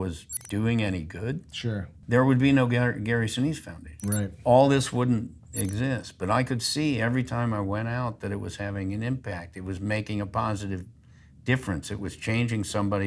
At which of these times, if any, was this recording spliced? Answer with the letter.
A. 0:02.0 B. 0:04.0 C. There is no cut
A